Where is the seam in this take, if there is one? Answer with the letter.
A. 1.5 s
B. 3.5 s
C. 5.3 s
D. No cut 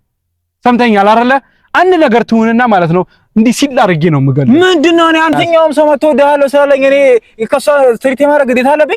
C